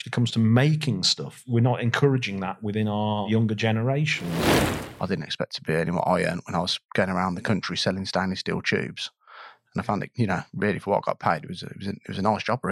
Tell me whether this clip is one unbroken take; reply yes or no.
no